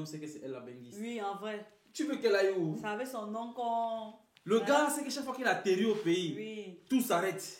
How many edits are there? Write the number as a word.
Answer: zero